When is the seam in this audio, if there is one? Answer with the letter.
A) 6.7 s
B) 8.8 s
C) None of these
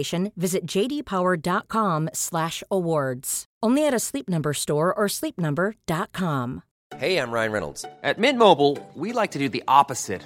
A